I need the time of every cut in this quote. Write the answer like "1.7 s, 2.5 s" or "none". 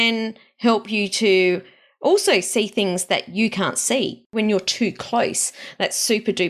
4.3 s